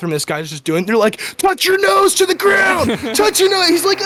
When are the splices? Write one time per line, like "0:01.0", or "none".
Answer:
none